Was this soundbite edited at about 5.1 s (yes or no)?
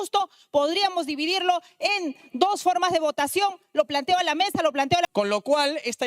yes